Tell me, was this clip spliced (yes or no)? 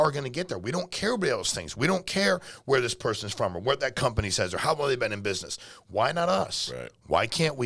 no